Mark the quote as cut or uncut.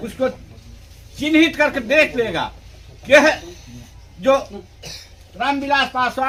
uncut